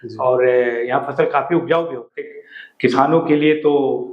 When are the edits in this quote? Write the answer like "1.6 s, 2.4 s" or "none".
2.3 s